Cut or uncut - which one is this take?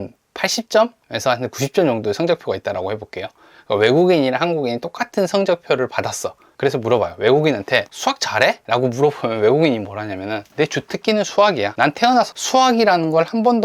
cut